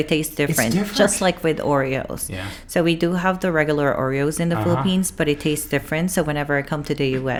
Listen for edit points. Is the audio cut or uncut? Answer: uncut